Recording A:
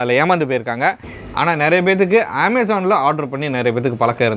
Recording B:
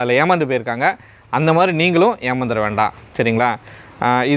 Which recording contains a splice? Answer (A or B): A